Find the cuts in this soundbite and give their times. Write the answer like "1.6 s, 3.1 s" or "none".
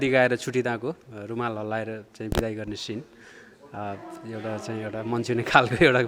none